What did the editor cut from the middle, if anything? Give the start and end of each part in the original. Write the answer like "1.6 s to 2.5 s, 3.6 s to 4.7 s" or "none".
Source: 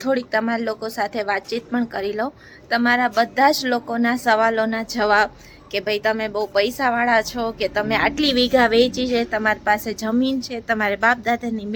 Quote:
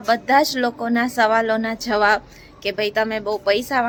none